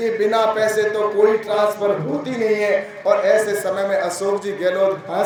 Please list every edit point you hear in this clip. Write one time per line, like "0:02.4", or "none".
none